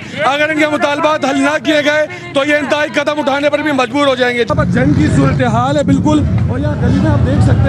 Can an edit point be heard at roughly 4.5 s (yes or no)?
yes